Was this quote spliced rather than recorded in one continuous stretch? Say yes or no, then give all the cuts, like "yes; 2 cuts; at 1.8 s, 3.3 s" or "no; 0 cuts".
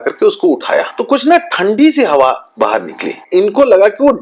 yes; 2 cuts; at 0.9 s, 3.2 s